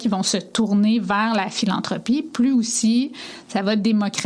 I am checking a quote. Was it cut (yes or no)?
no